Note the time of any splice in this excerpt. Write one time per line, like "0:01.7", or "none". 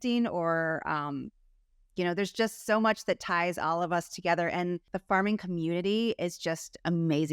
0:04.9